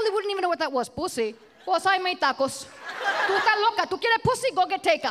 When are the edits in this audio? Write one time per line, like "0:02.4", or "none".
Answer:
0:01.5
0:03.3